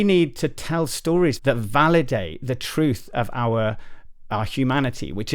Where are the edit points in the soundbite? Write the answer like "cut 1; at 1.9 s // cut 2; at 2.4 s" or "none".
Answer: cut 1; at 1.4 s